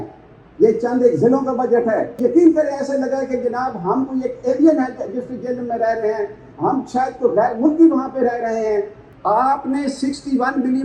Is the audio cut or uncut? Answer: cut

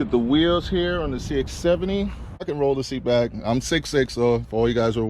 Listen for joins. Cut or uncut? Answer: cut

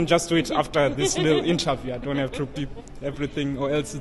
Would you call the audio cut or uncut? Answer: uncut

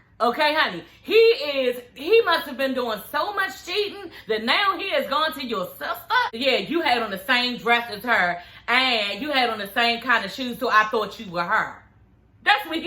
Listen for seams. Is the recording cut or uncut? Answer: cut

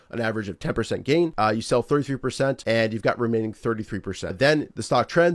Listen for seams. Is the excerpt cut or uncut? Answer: cut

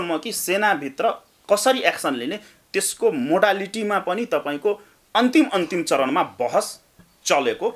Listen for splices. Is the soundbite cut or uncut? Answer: uncut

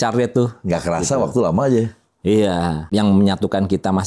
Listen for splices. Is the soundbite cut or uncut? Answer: cut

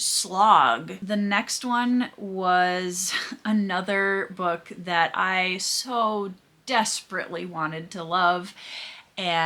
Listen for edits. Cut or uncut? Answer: cut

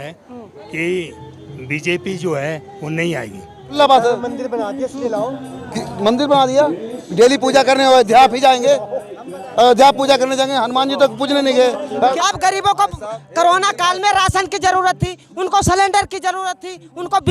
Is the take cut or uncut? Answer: cut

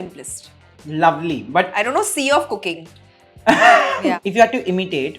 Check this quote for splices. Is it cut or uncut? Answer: cut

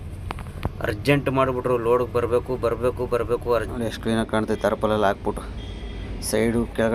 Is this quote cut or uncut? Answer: cut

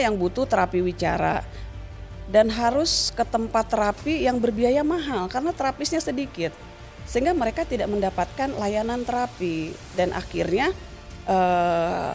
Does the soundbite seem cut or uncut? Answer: cut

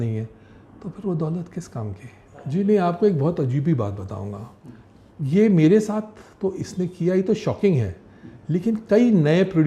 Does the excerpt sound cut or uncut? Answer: cut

